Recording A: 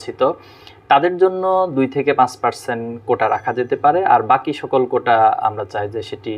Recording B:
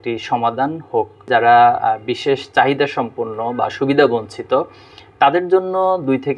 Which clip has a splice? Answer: B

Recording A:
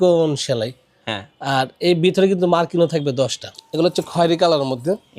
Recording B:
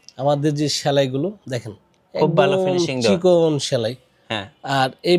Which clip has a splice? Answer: A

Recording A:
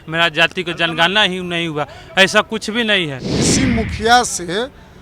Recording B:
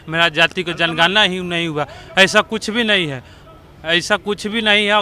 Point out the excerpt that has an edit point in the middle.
A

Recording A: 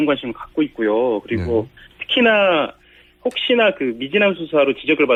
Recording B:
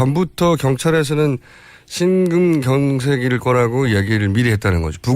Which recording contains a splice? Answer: B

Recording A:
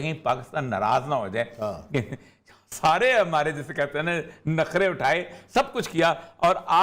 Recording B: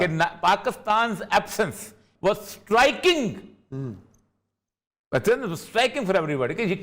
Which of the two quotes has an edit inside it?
B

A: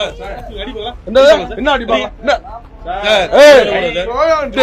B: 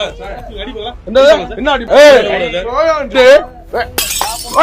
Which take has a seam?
B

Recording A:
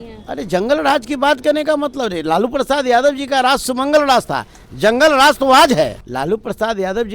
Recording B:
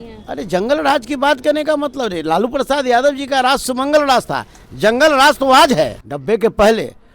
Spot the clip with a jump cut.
B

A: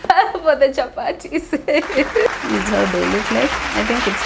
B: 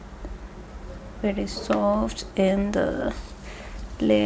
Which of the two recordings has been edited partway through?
A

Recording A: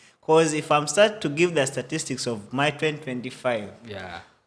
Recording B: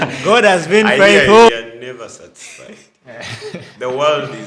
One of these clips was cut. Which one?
B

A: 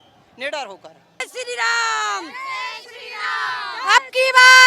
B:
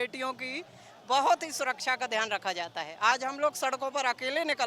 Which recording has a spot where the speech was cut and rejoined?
A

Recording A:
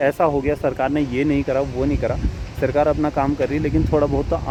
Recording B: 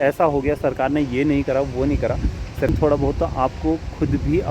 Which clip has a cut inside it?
B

